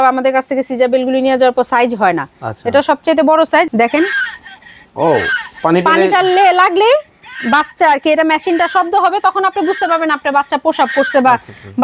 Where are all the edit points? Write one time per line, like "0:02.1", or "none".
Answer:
0:03.7